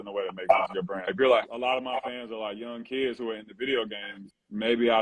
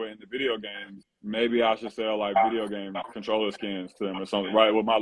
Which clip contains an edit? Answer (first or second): first